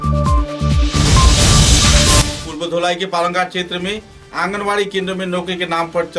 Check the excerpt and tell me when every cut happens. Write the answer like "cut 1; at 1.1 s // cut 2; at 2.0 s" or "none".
cut 1; at 2.4 s